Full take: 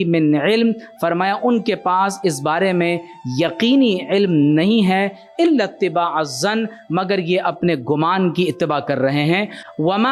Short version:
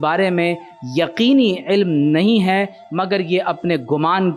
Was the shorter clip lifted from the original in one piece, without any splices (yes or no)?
no